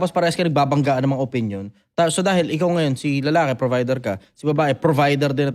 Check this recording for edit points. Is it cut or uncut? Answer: uncut